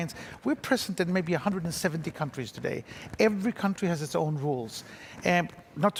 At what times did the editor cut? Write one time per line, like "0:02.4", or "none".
none